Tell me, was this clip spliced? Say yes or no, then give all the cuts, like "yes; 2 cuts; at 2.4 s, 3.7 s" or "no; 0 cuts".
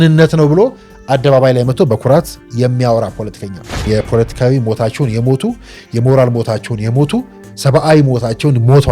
yes; 1 cut; at 3.8 s